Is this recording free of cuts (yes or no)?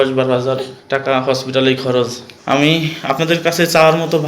no